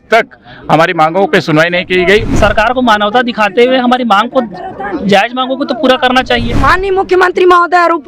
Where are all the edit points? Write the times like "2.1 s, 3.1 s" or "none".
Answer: 2.3 s, 6.6 s